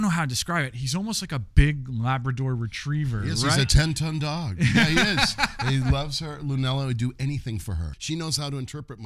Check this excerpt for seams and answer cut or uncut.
cut